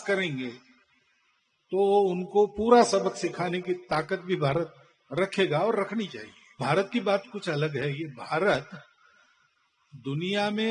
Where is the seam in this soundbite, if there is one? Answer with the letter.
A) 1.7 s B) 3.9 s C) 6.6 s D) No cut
C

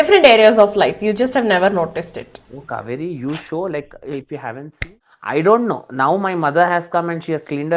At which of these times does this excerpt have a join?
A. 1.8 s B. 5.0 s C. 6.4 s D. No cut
B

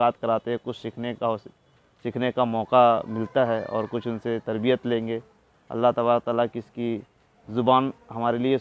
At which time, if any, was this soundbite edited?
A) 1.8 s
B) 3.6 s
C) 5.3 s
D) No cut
D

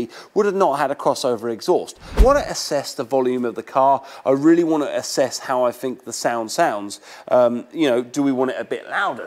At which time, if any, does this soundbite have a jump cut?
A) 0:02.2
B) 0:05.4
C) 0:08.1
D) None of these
A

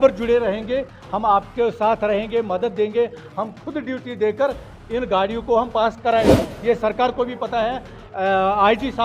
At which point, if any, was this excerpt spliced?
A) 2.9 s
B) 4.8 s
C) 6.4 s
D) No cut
C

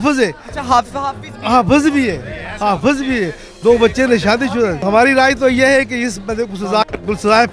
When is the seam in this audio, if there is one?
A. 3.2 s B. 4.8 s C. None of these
B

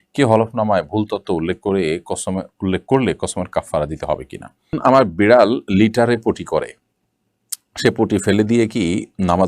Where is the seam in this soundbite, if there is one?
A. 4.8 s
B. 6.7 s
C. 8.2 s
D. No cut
A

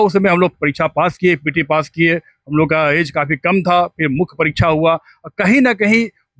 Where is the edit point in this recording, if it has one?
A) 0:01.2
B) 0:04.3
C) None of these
C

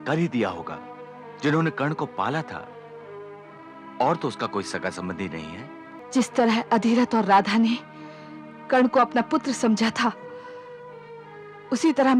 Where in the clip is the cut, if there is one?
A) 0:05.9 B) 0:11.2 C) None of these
A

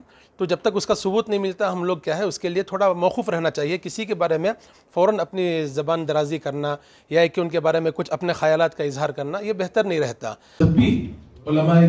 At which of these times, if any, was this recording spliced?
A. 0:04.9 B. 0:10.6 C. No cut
B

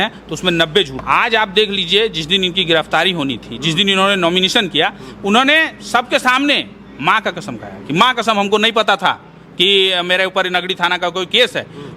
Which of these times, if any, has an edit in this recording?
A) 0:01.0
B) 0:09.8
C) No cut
A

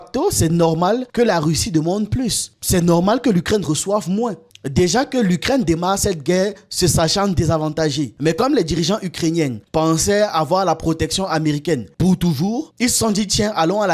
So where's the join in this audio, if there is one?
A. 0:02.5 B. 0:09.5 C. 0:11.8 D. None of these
D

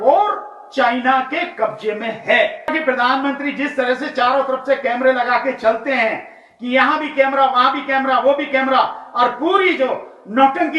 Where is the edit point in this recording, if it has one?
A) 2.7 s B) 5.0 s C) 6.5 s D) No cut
A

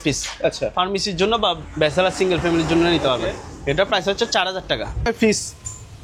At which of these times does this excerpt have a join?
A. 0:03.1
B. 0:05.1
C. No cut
B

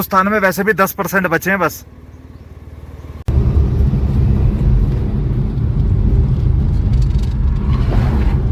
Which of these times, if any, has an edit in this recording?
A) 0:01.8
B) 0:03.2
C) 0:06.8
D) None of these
D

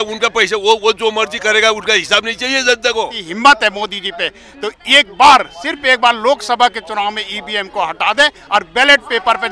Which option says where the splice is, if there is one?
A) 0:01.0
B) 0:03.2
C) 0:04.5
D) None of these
B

